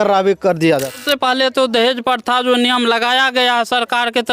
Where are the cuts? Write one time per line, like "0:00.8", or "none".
0:00.9